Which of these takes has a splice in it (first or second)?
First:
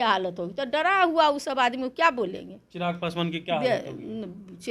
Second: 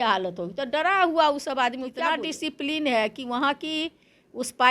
second